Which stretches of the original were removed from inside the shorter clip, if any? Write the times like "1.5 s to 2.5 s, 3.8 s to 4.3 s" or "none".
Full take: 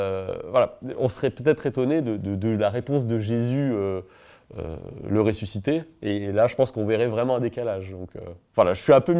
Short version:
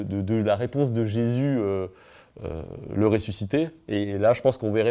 none